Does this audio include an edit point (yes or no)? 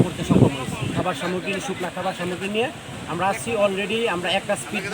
yes